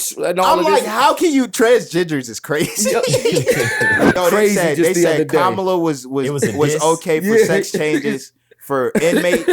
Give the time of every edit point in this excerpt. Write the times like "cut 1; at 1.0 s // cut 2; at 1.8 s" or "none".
cut 1; at 4.1 s